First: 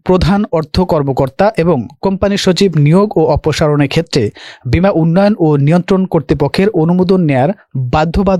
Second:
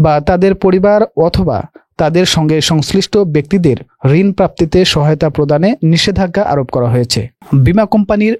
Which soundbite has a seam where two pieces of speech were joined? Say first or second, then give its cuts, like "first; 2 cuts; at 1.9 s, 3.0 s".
second; 1 cut; at 7.3 s